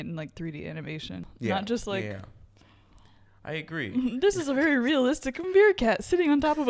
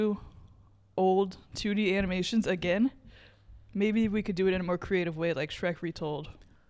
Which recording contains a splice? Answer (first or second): first